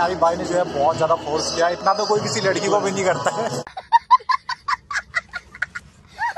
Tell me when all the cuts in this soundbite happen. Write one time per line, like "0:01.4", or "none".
0:03.7